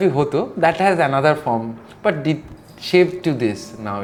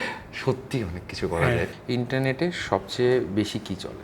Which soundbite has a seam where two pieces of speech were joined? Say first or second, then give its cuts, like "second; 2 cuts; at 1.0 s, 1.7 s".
second; 1 cut; at 1.7 s